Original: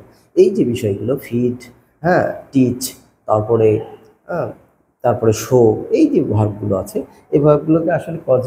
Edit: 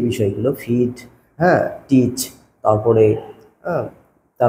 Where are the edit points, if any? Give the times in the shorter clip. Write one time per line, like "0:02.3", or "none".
none